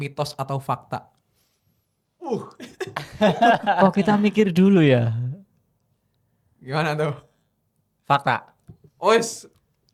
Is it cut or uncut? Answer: uncut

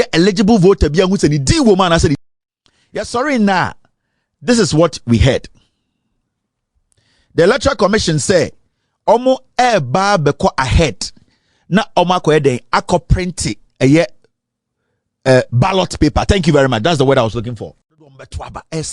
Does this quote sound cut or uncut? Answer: cut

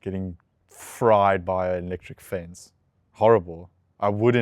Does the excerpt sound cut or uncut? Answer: uncut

